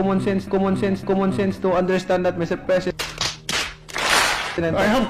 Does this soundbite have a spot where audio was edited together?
no; 0 cuts

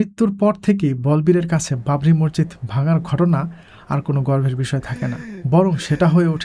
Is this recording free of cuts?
yes; 0 cuts

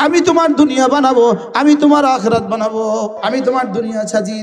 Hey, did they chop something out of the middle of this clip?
yes; 1 cut; at 3.2 s

